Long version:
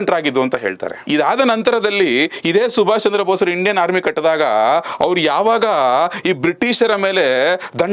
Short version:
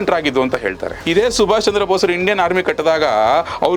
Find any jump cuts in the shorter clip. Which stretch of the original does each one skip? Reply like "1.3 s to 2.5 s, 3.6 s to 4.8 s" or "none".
1.0 s to 2.4 s